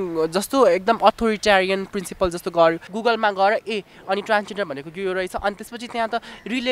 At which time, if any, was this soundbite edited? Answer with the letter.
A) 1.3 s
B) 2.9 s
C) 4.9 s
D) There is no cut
B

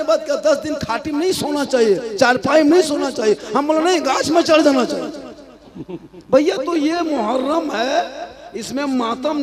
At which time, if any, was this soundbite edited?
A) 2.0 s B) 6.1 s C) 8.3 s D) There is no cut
D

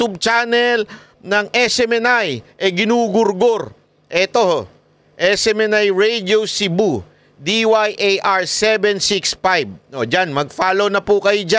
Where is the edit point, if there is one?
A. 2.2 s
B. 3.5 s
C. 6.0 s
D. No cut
D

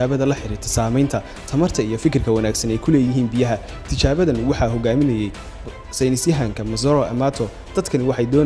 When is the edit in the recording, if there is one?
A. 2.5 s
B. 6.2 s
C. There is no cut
A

